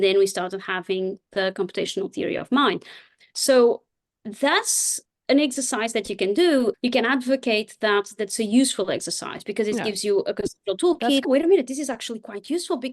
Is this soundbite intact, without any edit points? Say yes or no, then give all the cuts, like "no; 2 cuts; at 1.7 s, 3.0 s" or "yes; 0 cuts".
no; 2 cuts; at 6.7 s, 11.3 s